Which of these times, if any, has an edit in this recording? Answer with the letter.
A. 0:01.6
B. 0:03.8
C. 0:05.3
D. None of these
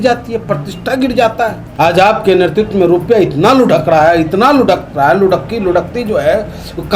A